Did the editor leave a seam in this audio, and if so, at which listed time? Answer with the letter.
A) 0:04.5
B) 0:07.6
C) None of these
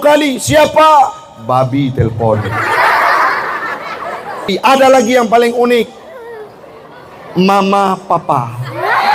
A